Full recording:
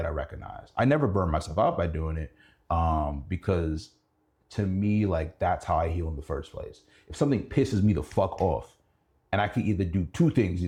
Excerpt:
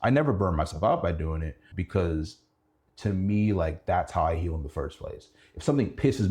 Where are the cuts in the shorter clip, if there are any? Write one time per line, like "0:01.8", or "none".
0:01.7